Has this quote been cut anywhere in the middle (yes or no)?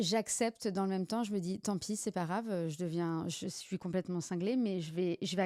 no